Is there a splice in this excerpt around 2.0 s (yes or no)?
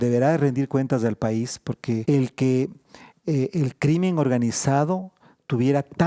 yes